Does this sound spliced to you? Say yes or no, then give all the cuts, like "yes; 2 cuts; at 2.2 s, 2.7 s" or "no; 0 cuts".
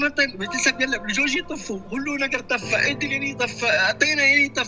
no; 0 cuts